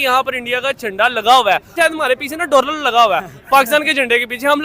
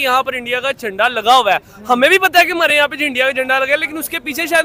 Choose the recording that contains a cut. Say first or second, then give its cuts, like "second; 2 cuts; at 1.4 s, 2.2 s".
first; 1 cut; at 1.7 s